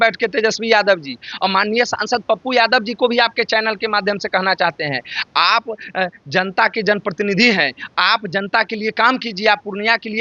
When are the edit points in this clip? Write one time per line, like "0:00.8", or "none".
none